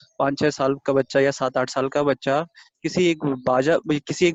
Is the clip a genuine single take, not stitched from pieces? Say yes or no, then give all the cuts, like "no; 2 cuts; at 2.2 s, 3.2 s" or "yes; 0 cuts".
yes; 0 cuts